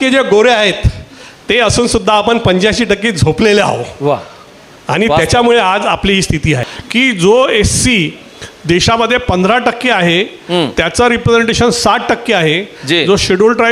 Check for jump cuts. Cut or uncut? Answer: cut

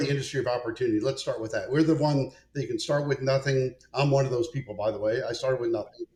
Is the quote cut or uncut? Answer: uncut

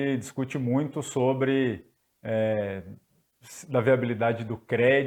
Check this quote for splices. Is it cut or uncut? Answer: uncut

